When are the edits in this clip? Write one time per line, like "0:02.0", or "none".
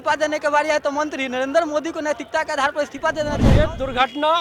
0:03.5